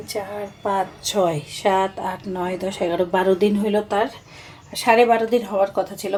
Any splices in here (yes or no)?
no